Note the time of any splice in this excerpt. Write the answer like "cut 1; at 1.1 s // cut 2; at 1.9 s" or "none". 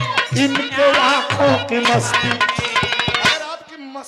none